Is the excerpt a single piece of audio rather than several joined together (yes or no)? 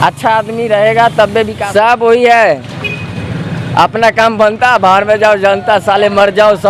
no